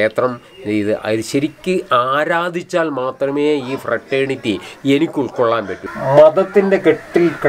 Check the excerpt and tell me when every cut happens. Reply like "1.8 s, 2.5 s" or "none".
5.8 s